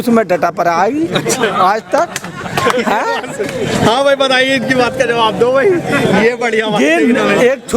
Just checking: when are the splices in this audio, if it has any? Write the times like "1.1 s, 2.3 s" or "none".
none